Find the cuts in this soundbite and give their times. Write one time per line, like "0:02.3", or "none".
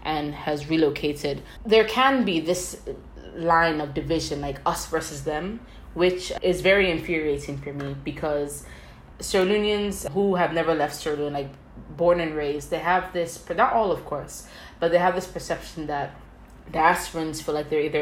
0:01.5